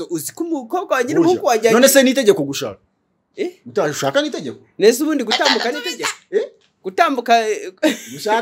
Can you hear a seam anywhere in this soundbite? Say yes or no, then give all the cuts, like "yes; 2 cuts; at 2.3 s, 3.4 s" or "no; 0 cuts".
no; 0 cuts